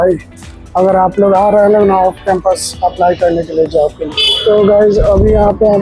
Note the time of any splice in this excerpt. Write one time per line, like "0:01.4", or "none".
0:04.0